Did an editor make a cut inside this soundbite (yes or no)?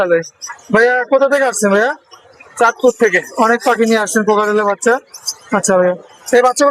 no